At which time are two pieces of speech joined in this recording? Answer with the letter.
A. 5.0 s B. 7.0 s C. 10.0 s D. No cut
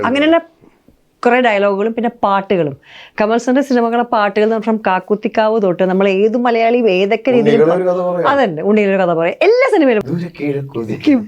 C